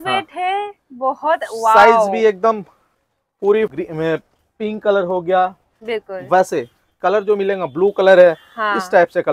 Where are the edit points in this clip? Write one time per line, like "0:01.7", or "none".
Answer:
0:03.7